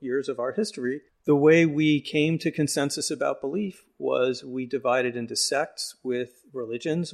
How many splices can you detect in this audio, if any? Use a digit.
1